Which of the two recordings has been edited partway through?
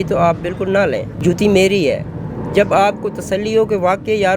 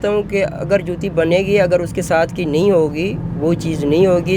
first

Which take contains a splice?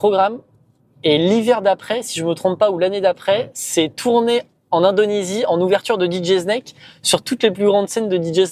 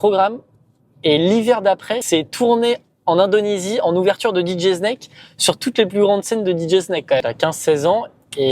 second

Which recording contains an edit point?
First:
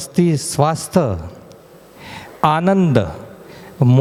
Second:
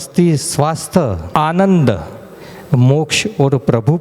second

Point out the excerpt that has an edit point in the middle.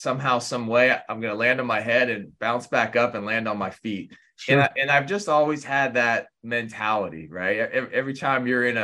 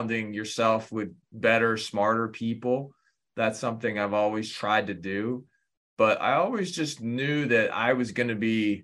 second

